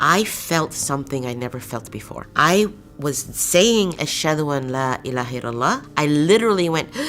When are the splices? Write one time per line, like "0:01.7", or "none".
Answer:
0:05.9